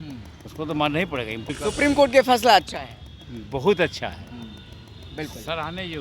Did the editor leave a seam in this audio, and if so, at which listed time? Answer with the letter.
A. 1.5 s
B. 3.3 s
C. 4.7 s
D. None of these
A